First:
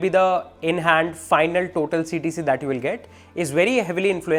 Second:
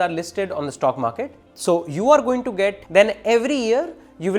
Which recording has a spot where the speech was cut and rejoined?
second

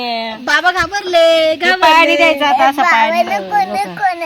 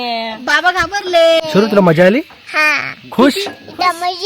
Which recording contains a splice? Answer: second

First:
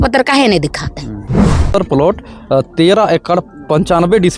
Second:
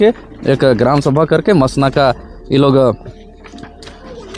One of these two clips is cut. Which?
first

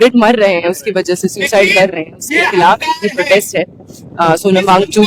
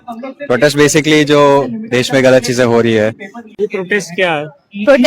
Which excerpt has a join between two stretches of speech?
second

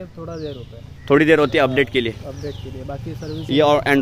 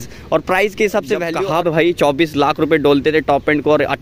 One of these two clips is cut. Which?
second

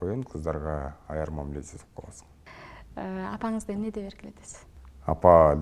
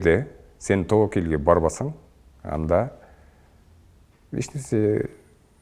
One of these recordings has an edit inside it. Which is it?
first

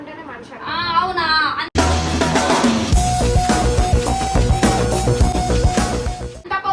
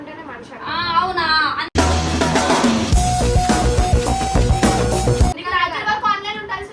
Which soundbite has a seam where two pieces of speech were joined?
second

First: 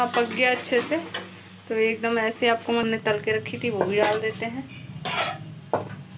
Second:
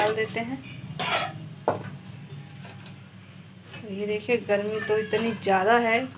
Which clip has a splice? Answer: first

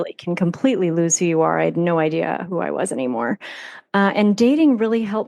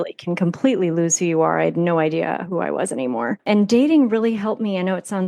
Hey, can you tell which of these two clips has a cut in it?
second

